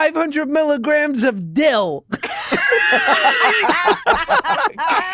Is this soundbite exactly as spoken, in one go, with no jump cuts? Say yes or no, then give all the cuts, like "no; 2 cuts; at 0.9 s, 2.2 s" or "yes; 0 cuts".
yes; 0 cuts